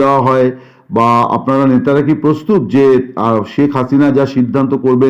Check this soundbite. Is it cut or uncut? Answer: uncut